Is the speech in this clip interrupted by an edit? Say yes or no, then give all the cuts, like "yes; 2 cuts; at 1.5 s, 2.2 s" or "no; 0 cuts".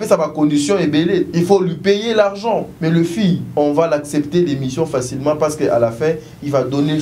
yes; 3 cuts; at 1.3 s, 2.7 s, 3.5 s